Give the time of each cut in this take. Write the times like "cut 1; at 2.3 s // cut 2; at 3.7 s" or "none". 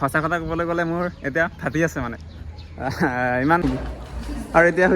cut 1; at 3.6 s